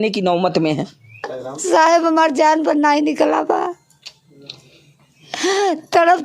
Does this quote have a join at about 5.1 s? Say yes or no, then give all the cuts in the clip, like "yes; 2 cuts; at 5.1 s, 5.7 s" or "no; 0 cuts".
no; 1 cut; at 1.3 s